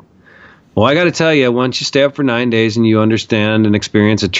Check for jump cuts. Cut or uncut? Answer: uncut